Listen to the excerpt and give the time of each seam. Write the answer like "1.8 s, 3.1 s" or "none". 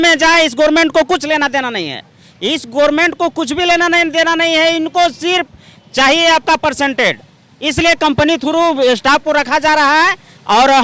none